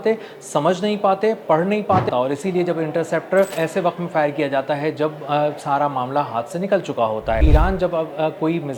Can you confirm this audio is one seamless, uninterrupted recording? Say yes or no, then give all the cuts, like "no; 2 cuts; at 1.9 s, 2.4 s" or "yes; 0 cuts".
no; 3 cuts; at 2.1 s, 3.5 s, 7.4 s